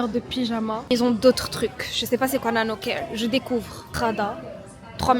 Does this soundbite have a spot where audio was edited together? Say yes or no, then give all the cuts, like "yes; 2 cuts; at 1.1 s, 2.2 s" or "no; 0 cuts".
yes; 2 cuts; at 0.9 s, 3.8 s